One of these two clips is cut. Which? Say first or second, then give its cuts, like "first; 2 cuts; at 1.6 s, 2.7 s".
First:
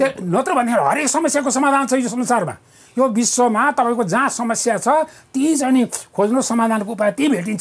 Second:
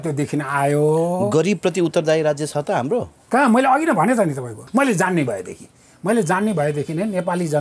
second; 1 cut; at 4.5 s